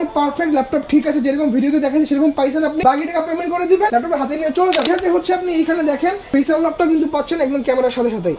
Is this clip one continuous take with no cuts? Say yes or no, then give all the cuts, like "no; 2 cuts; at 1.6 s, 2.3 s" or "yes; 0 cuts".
no; 4 cuts; at 2.8 s, 3.9 s, 4.9 s, 6.2 s